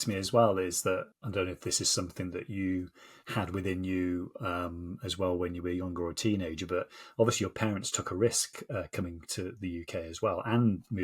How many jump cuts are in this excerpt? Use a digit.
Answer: 1